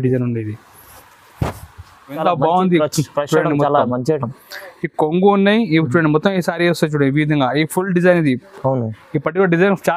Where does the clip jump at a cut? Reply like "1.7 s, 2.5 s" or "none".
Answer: 2.2 s